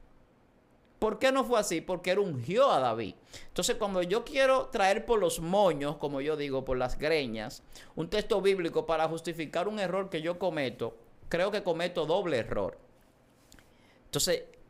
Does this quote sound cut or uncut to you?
uncut